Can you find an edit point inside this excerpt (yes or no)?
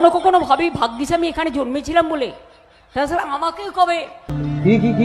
no